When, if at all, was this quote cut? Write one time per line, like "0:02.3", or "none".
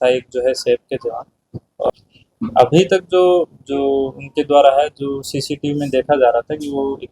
0:01.9